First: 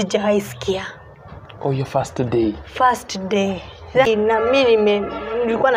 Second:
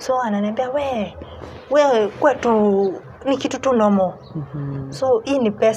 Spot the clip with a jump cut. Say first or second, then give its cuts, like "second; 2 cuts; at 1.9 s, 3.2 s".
first; 1 cut; at 4.0 s